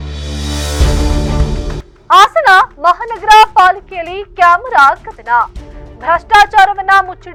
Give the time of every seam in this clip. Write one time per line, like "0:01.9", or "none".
none